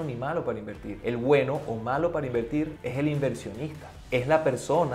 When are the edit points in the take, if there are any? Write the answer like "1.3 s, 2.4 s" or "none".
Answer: none